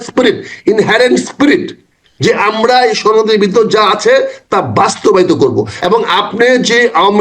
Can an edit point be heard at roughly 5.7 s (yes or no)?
yes